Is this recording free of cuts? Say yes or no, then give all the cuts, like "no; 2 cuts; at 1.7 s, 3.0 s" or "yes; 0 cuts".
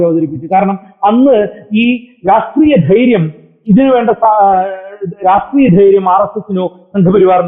yes; 0 cuts